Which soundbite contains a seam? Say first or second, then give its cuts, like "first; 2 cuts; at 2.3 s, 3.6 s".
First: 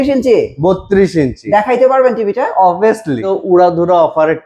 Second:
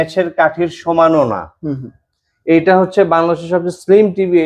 first; 1 cut; at 3.2 s